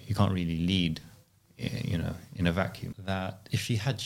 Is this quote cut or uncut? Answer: cut